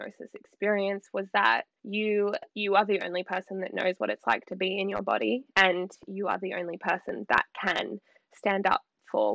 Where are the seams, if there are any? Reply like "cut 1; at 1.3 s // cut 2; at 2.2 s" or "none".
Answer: none